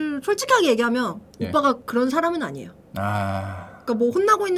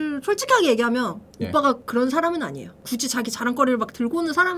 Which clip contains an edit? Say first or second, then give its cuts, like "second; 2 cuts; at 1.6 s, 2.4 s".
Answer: second; 1 cut; at 2.8 s